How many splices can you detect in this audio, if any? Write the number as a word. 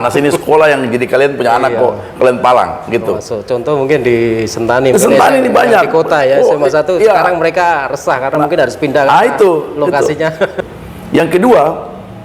one